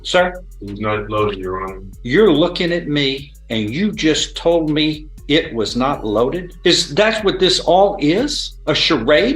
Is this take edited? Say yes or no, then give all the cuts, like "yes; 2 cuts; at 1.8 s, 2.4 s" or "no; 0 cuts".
yes; 4 cuts; at 1.9 s, 3.3 s, 6.5 s, 8.5 s